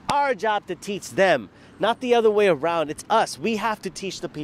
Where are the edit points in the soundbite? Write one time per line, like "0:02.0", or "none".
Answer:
none